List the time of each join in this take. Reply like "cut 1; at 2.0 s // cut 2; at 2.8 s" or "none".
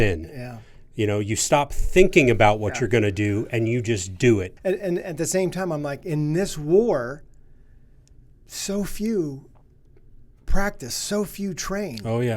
cut 1; at 4.5 s